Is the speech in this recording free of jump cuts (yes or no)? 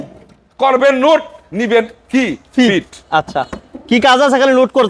yes